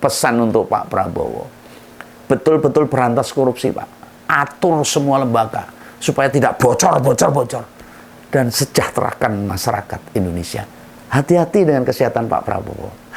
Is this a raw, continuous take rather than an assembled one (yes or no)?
yes